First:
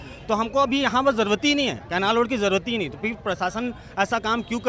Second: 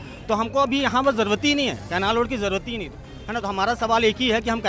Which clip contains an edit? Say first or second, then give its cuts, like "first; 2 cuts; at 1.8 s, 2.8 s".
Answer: second; 1 cut; at 3.0 s